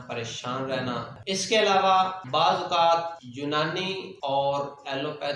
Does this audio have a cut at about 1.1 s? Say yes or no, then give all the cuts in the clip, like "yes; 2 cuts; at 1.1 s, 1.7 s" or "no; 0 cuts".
yes; 1 cut; at 1.1 s